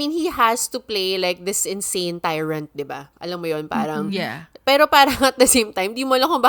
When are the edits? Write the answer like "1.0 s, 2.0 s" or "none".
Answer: none